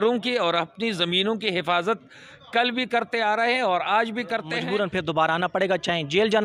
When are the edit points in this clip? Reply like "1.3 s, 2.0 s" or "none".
4.5 s